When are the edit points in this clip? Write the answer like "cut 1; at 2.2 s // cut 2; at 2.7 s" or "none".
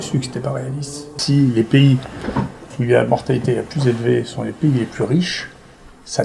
cut 1; at 1.1 s

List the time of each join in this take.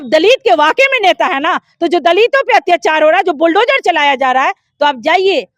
none

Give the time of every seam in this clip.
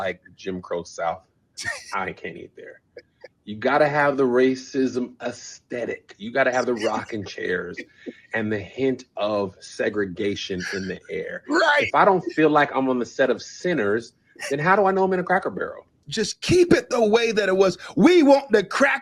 cut 1; at 16.0 s

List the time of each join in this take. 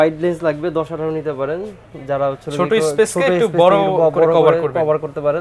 none

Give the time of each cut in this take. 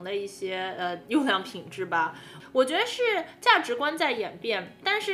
cut 1; at 1.0 s // cut 2; at 2.3 s

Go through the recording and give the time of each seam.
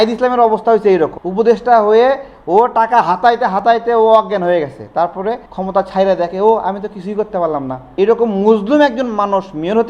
cut 1; at 1.2 s // cut 2; at 5.5 s // cut 3; at 7.8 s

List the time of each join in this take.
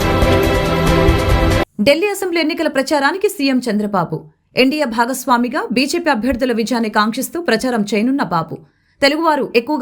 cut 1; at 1.6 s

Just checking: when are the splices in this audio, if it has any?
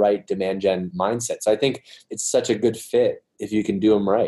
cut 1; at 0.9 s // cut 2; at 2.1 s

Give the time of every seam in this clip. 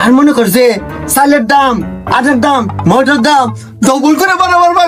none

